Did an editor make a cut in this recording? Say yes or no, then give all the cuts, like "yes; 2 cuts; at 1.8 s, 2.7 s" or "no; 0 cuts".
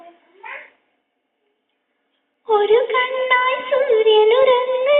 no; 0 cuts